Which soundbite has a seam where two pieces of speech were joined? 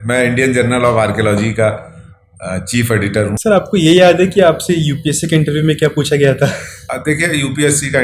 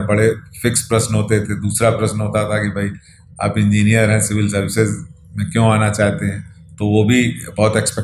first; 1 cut; at 3.4 s

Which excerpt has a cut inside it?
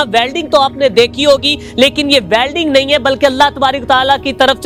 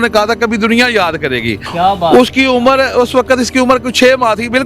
second; 1 cut; at 1.6 s

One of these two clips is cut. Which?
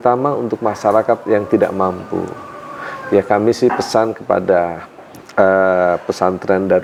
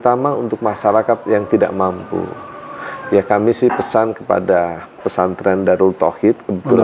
second; 1 cut; at 5.0 s

